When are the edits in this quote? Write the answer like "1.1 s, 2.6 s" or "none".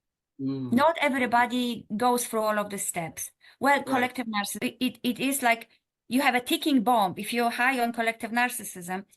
4.6 s